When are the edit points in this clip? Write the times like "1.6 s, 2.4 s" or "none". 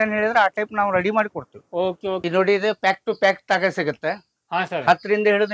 2.2 s